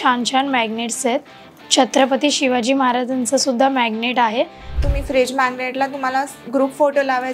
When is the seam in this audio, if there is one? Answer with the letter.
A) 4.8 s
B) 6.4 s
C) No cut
A